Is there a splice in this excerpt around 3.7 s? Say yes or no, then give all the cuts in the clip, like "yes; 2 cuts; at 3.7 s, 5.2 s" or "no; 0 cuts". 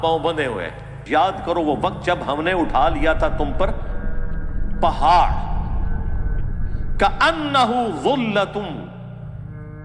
no; 1 cut; at 1.0 s